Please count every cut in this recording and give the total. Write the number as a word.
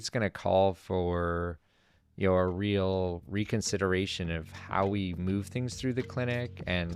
zero